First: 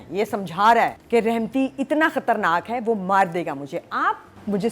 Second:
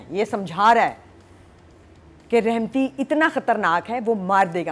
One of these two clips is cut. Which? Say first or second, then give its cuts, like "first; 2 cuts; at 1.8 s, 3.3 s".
first; 1 cut; at 1.0 s